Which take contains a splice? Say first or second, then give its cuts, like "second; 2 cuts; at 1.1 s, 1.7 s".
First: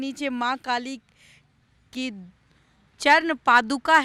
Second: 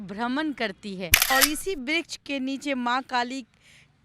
second; 1 cut; at 1.3 s